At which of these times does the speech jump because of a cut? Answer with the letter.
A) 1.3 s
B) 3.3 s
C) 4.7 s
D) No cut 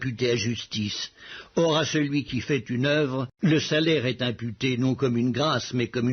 A